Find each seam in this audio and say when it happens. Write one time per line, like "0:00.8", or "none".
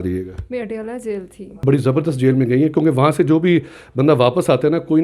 0:01.6